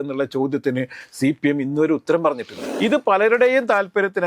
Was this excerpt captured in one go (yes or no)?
no